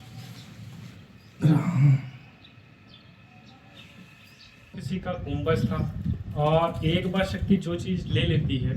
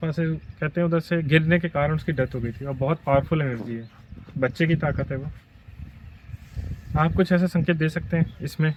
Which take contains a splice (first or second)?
first